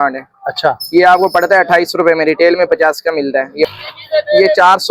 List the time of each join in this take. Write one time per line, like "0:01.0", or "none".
0:03.7